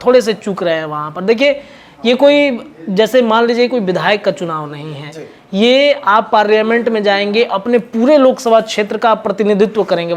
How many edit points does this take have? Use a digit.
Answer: 0